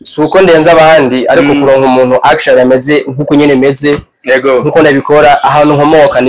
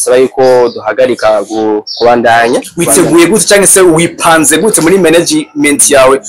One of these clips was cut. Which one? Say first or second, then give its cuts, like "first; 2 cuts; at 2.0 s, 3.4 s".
second; 1 cut; at 2.8 s